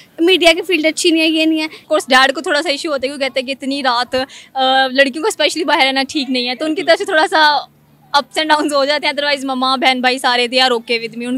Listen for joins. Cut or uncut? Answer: cut